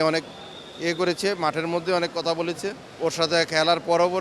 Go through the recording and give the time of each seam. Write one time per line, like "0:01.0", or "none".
0:02.9

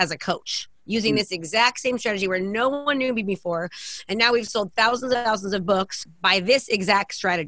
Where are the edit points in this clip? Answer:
0:06.1

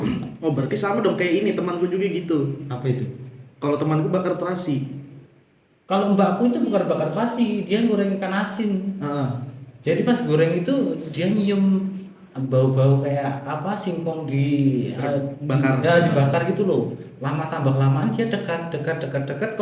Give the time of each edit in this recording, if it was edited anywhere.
none

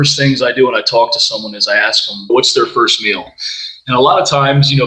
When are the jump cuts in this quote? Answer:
0:02.3

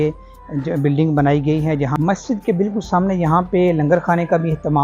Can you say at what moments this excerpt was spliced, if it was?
0:01.9

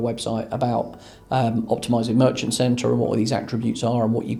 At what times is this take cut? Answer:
none

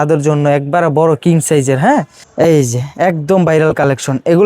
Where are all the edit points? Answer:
0:02.2

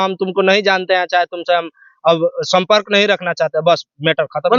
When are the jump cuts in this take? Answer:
none

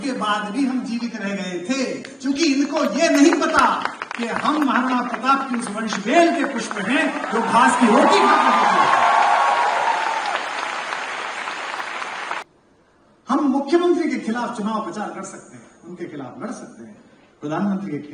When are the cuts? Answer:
0:12.4

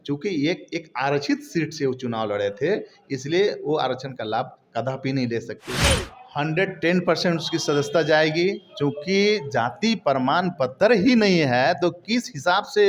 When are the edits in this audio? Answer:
0:05.7

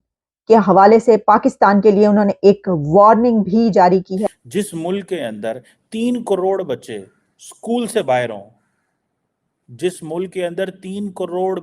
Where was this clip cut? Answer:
0:04.2

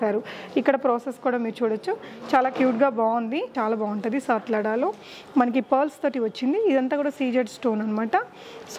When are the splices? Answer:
0:03.5

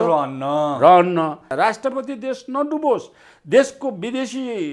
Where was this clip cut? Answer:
0:01.5

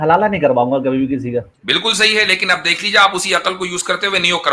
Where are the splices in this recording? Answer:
0:01.6

